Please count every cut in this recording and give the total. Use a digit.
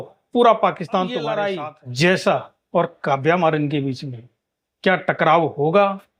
1